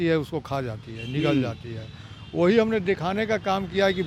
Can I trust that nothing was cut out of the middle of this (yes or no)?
yes